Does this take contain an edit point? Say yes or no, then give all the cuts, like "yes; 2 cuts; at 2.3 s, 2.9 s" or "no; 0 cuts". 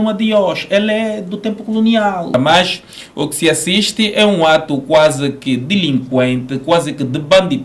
yes; 1 cut; at 2.3 s